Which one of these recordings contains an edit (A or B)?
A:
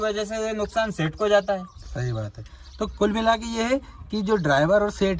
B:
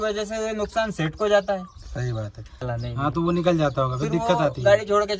B